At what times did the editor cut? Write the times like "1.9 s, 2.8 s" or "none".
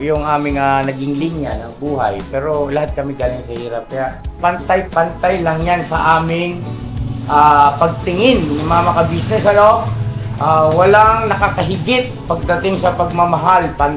4.4 s